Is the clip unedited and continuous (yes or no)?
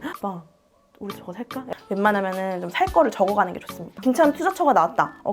no